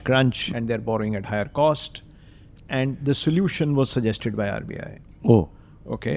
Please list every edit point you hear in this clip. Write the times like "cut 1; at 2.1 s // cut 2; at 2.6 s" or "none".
none